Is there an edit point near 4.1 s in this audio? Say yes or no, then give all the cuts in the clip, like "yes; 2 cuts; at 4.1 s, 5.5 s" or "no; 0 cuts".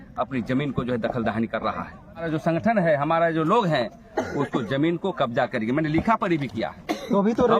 no; 1 cut; at 2.2 s